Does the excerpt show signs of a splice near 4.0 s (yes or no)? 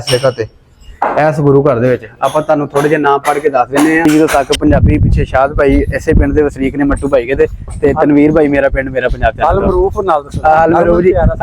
yes